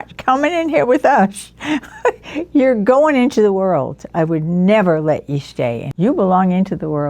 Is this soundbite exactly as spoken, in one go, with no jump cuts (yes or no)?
yes